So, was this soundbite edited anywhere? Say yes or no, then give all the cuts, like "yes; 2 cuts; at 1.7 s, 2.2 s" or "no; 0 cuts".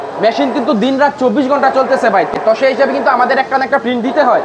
no; 0 cuts